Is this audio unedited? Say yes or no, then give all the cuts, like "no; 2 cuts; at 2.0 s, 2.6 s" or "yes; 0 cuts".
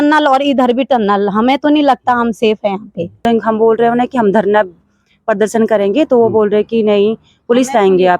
no; 1 cut; at 3.2 s